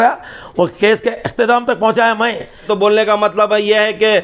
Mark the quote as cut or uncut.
cut